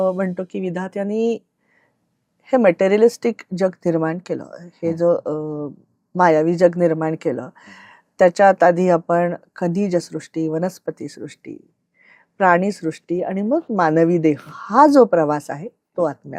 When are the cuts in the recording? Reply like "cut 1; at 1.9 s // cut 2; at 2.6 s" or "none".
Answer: none